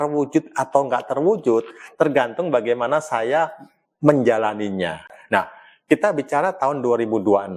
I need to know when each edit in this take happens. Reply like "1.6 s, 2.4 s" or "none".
5.1 s